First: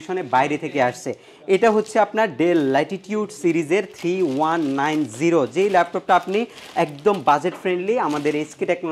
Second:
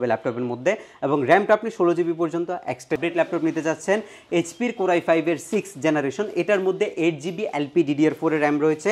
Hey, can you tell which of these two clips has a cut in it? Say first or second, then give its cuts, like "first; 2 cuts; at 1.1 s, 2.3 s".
second; 1 cut; at 3.0 s